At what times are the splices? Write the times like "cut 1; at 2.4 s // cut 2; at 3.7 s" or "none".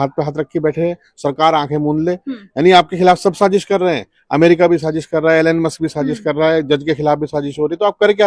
none